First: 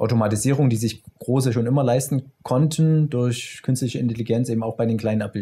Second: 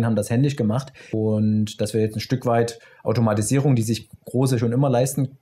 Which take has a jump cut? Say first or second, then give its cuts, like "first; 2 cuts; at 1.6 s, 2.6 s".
second; 1 cut; at 1.1 s